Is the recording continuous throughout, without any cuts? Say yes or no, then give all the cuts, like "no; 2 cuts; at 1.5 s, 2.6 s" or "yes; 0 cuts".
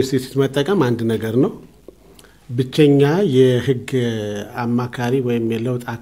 yes; 0 cuts